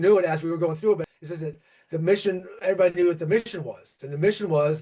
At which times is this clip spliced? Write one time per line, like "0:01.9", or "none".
0:01.0

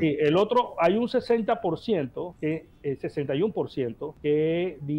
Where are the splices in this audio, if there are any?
0:02.3
0:04.1

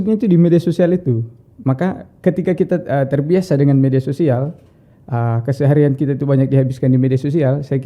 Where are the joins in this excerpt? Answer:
none

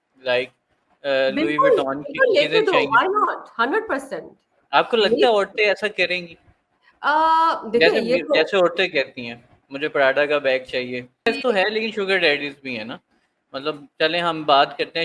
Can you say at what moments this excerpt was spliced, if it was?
0:11.3

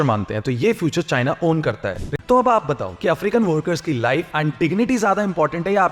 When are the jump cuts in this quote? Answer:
0:02.0

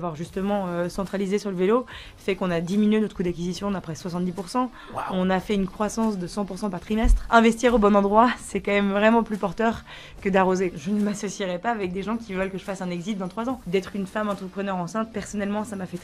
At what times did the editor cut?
0:07.2
0:10.8
0:13.6

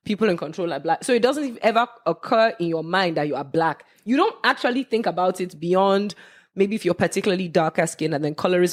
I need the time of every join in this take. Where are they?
none

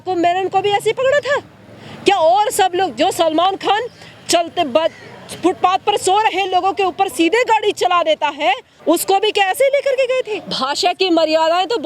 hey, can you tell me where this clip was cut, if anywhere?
0:08.7
0:10.5

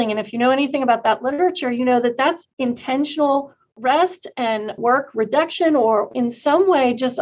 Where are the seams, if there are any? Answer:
0:02.5
0:04.8
0:06.1

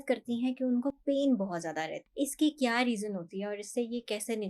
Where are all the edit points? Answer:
0:02.0

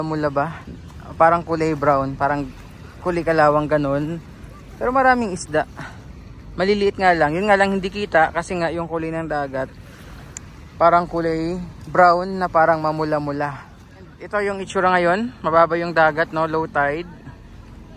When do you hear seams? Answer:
0:14.2

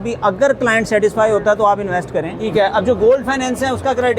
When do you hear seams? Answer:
0:02.4

